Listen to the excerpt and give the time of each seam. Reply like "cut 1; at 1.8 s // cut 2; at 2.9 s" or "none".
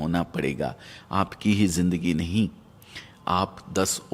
none